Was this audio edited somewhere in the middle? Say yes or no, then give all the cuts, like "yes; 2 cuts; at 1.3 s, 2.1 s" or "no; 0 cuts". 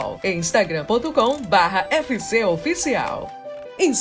no; 0 cuts